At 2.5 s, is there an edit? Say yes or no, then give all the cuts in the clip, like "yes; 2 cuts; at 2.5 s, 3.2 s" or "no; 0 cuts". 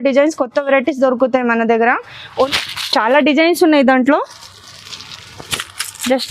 yes; 1 cut; at 2.5 s